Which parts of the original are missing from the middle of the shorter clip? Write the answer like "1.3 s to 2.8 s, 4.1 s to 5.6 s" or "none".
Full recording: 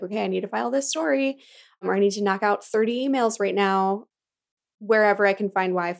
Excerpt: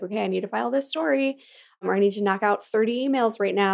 none